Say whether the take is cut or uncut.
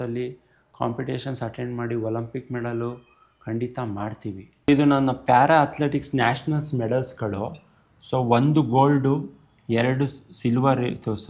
cut